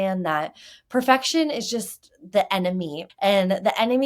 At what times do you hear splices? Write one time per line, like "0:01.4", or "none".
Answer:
0:03.1

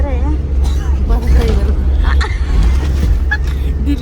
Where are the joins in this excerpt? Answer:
none

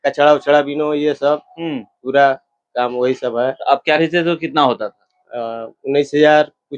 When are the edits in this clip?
0:04.0

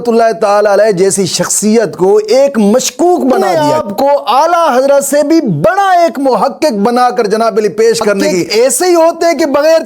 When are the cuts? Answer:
0:03.4
0:08.4

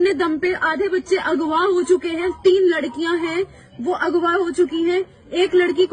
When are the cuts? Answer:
none

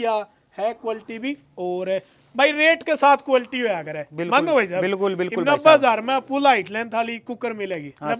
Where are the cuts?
none

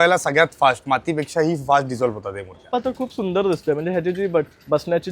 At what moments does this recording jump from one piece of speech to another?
0:02.7

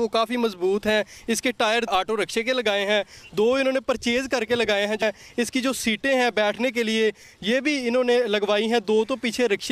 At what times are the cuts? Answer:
0:01.9
0:05.0

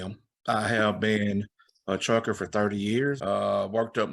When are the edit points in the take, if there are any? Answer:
0:03.2

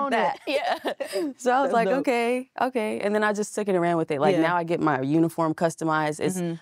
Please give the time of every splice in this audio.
none

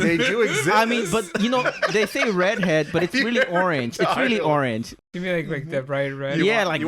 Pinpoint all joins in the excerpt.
0:05.0

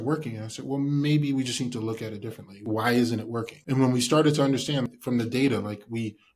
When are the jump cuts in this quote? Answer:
0:02.6
0:03.5
0:05.0

